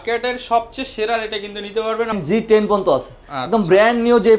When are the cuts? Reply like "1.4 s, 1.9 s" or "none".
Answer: 2.2 s